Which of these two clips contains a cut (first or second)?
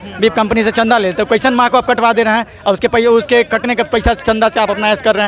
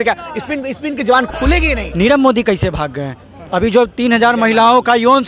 second